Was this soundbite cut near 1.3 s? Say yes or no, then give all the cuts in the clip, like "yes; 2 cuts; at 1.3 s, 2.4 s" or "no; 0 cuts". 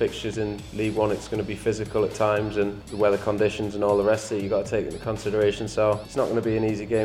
no; 2 cuts; at 2.8 s, 6.1 s